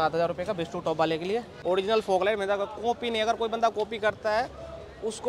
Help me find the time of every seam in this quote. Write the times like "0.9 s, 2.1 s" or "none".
1.6 s